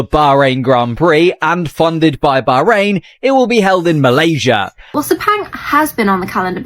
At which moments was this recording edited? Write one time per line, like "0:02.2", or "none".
0:04.9